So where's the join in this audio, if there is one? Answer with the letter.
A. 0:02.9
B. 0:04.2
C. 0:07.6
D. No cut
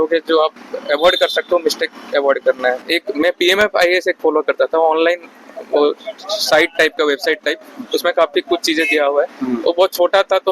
A